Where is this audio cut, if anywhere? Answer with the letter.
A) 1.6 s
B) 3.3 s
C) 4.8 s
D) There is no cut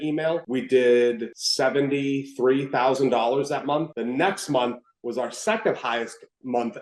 D